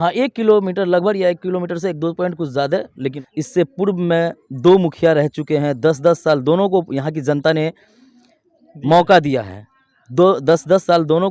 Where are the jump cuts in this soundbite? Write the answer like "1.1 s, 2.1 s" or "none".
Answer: 3.2 s